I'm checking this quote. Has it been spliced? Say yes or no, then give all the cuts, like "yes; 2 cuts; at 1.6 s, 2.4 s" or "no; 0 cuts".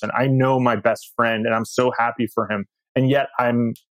no; 0 cuts